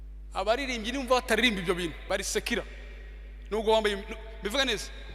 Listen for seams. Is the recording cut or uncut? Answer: cut